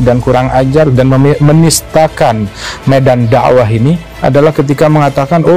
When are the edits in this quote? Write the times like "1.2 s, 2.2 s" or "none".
4.1 s